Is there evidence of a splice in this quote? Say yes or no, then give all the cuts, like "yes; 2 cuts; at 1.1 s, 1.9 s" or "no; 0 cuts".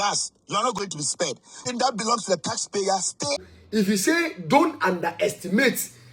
yes; 2 cuts; at 1.6 s, 3.4 s